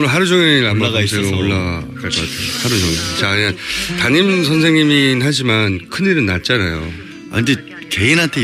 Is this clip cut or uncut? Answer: cut